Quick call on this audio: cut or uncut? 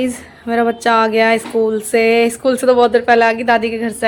uncut